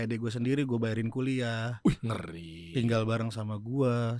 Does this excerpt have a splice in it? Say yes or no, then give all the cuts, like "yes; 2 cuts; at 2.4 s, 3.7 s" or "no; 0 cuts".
no; 0 cuts